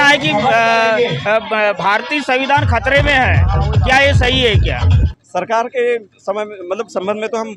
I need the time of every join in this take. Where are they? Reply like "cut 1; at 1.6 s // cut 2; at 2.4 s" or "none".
cut 1; at 4.9 s